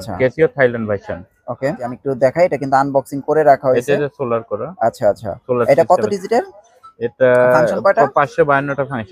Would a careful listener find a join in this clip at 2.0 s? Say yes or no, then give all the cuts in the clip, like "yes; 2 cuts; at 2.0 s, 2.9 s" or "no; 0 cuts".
yes; 1 cut; at 2.0 s